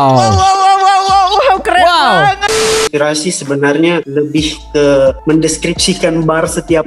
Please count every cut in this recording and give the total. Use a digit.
3